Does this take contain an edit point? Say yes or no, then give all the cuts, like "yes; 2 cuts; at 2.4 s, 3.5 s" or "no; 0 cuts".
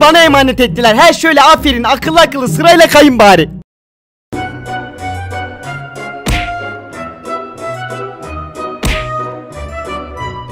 no; 0 cuts